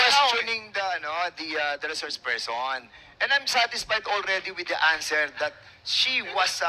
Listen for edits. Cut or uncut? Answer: uncut